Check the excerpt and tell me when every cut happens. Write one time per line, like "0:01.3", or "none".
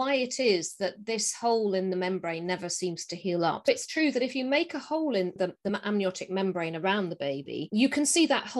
0:03.7
0:05.4